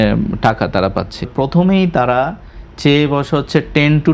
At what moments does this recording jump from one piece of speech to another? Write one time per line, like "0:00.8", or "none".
0:01.3